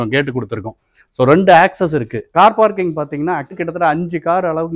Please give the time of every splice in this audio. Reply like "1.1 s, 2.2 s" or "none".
2.2 s, 3.5 s